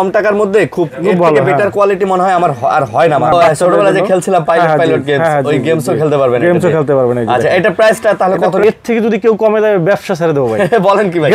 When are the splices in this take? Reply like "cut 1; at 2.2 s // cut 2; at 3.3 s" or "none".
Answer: cut 1; at 3.3 s // cut 2; at 8.6 s